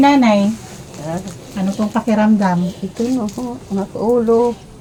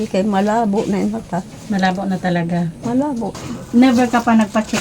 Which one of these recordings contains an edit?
second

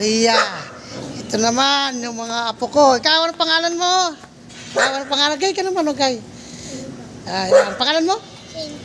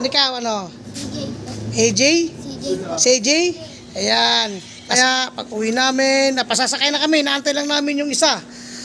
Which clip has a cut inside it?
second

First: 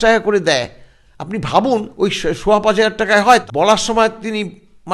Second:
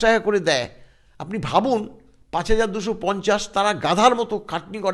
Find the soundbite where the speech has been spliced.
first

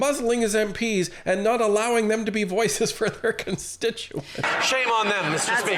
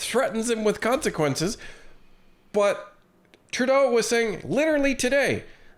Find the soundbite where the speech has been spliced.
first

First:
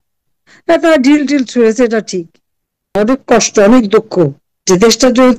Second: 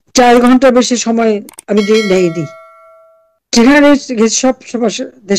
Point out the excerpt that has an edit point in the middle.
first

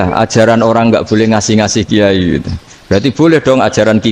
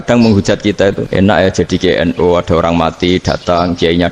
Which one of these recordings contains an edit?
second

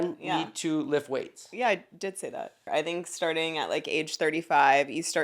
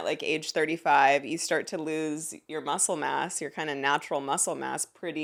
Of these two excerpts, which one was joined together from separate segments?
first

